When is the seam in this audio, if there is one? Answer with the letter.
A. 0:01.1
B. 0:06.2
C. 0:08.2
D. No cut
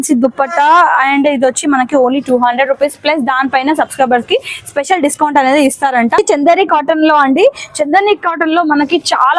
B